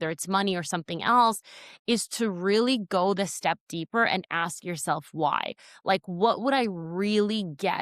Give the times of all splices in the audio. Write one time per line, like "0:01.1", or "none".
none